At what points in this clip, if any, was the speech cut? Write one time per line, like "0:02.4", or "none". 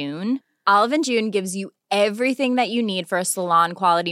none